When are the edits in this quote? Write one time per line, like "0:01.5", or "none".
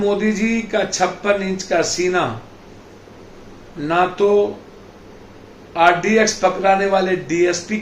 none